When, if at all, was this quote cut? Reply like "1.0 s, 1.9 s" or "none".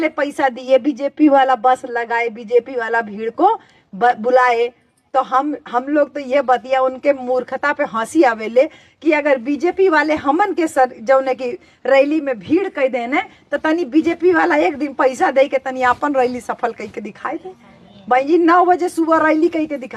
none